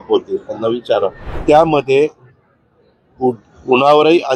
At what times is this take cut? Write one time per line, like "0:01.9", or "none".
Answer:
0:01.4